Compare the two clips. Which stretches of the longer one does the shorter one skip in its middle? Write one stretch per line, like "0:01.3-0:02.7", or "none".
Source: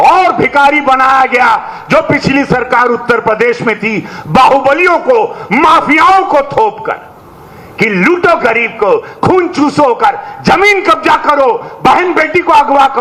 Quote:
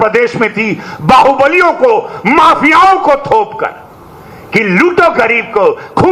none